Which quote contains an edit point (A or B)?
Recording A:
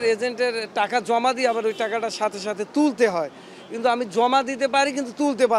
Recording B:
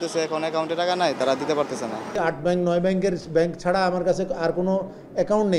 B